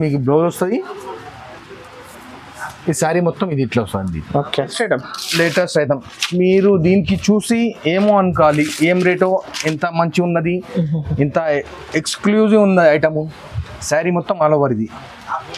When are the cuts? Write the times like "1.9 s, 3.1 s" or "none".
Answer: 4.7 s